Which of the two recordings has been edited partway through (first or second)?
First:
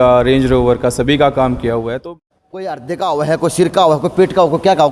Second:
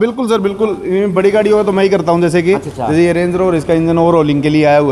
first